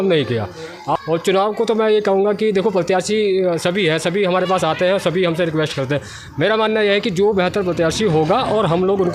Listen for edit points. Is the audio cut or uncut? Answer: uncut